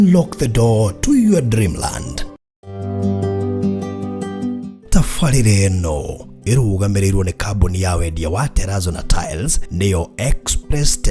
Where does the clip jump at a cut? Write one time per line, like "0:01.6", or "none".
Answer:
0:02.7

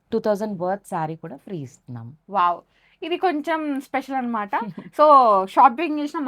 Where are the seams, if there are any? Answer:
none

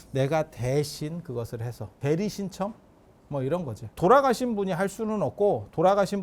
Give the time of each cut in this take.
0:01.9
0:04.0

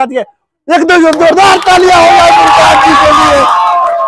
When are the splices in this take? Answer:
none

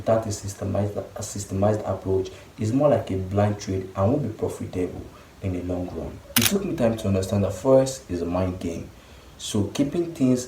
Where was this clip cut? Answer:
0:06.1

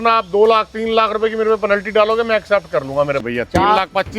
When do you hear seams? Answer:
0:03.2

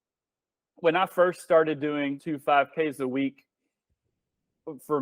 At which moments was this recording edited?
0:02.2

